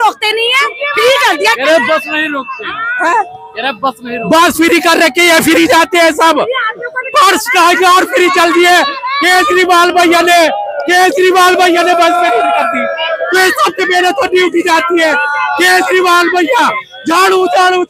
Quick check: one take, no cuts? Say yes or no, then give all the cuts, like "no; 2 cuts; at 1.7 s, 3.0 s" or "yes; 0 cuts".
yes; 0 cuts